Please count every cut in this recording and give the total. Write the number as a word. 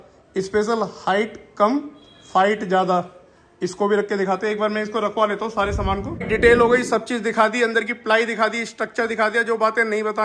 one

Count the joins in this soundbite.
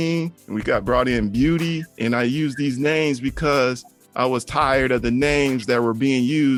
zero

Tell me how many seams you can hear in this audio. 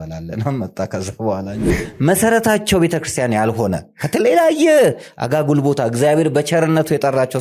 one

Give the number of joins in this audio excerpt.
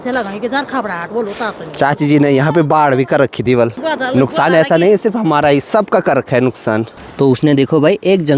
two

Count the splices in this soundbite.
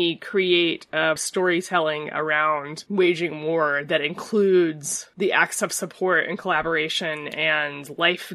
one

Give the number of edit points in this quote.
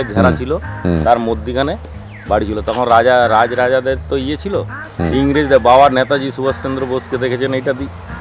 zero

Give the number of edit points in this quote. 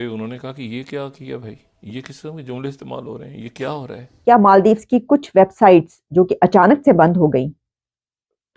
one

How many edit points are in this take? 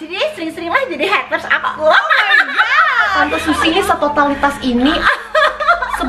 one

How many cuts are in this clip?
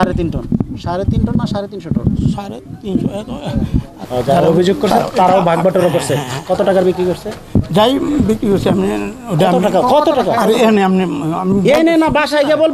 one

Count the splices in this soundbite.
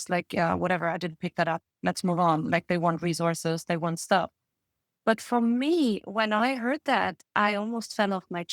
zero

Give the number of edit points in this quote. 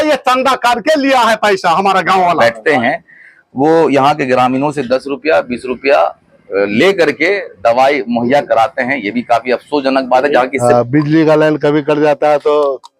two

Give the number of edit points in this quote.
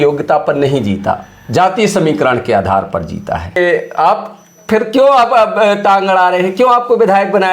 one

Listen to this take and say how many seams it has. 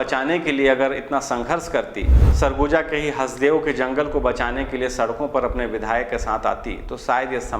one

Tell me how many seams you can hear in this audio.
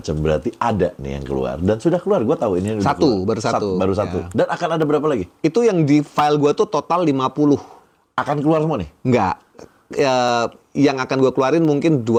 zero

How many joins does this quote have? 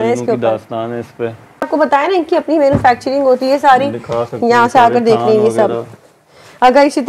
one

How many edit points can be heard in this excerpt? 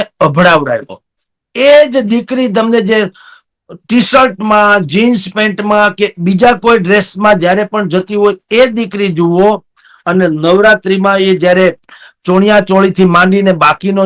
one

